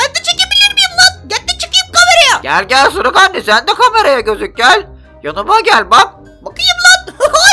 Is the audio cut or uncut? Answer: cut